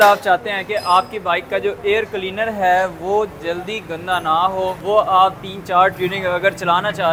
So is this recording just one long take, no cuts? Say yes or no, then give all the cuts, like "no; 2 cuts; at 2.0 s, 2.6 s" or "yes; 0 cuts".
yes; 0 cuts